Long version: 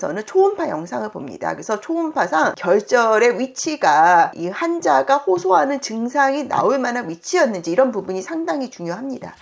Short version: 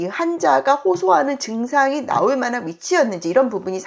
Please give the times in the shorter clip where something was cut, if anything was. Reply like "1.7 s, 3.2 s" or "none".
none